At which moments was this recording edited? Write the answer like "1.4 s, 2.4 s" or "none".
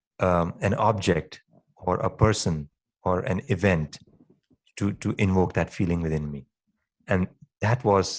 none